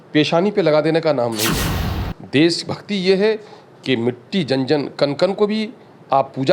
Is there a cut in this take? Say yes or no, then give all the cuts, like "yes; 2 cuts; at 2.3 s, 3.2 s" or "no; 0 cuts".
no; 0 cuts